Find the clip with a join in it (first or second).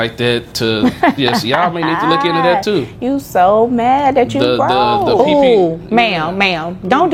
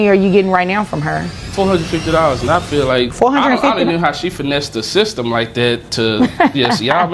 second